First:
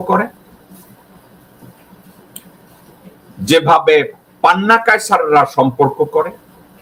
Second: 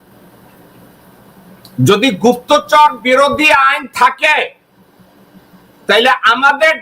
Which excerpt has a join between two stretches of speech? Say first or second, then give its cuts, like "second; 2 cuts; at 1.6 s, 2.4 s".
second; 1 cut; at 1.8 s